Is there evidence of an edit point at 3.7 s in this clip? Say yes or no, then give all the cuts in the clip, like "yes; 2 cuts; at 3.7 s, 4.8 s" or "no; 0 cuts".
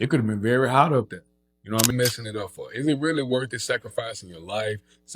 no; 1 cut; at 1.9 s